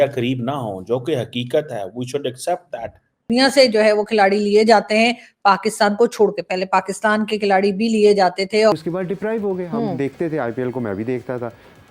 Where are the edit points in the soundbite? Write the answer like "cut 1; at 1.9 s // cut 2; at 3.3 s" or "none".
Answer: cut 1; at 3.3 s // cut 2; at 8.7 s